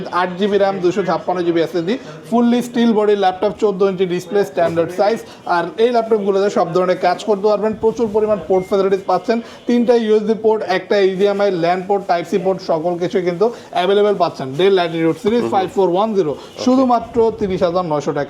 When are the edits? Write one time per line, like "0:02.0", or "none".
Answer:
none